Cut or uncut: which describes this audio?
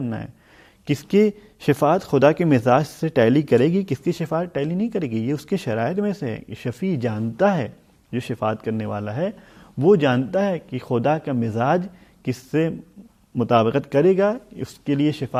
uncut